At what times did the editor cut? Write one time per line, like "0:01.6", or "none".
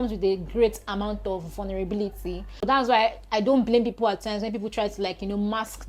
none